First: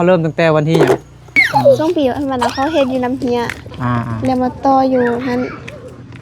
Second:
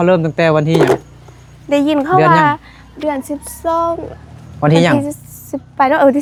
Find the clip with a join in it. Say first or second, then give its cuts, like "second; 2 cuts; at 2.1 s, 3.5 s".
first; 1 cut; at 1.4 s